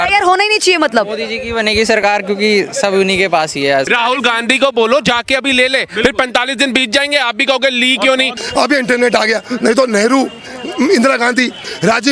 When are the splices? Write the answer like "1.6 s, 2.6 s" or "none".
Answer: 3.9 s, 8.3 s